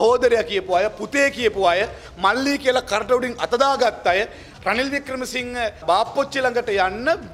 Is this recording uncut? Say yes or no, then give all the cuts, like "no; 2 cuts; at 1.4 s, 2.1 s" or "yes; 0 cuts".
no; 2 cuts; at 4.5 s, 5.8 s